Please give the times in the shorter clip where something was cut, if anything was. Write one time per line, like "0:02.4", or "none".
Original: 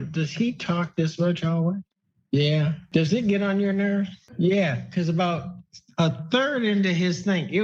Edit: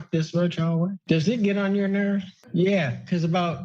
0:01.0